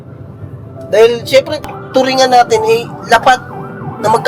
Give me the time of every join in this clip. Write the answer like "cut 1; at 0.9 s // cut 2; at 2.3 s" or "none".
cut 1; at 1.5 s